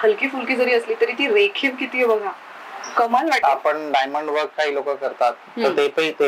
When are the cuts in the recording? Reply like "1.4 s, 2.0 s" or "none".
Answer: 3.4 s